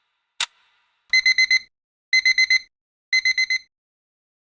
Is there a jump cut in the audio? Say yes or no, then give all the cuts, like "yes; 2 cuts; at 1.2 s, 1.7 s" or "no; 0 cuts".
no; 0 cuts